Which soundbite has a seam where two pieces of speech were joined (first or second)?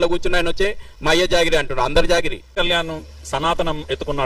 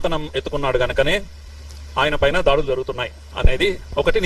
first